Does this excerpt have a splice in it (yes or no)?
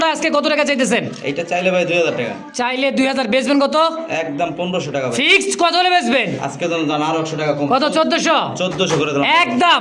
no